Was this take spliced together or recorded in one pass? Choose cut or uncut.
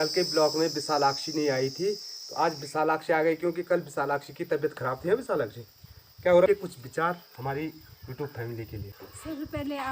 cut